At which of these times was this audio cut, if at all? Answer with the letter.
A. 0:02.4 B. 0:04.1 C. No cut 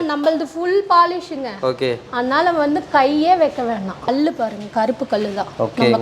B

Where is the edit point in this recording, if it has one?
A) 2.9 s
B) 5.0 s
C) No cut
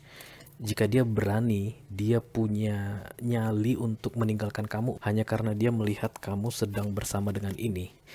B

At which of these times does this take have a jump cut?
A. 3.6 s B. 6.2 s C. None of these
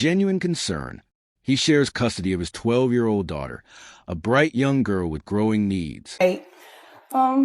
C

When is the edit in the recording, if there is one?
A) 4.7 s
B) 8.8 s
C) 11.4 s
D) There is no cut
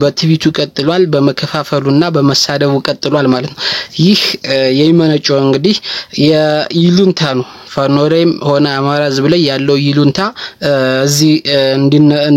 D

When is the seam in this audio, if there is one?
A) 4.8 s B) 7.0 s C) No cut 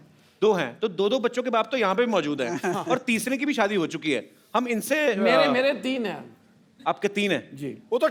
C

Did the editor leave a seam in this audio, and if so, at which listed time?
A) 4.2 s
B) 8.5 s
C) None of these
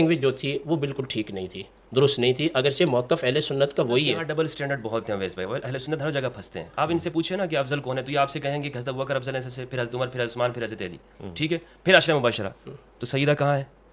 A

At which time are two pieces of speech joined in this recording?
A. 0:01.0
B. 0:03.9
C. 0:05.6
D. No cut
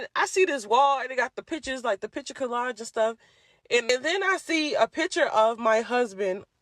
B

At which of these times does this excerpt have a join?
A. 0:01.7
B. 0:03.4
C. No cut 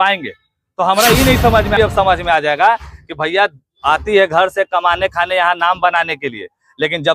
A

